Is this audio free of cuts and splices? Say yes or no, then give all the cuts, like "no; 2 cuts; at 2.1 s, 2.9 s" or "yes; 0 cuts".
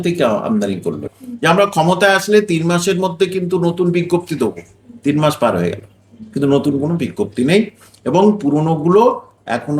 no; 1 cut; at 1.1 s